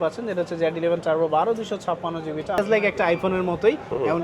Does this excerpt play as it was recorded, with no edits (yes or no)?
no